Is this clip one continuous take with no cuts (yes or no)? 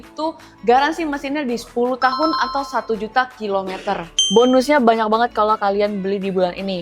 no